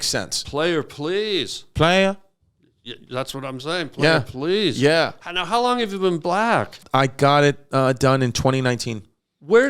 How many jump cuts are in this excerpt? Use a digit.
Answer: 1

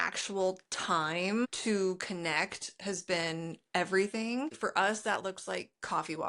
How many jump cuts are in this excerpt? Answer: 2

